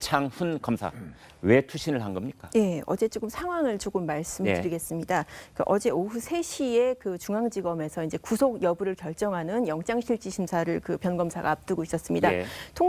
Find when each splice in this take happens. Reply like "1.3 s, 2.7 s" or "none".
10.3 s